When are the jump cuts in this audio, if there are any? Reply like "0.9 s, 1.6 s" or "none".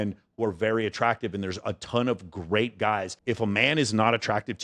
3.1 s

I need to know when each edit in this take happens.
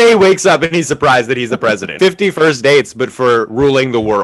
1.9 s

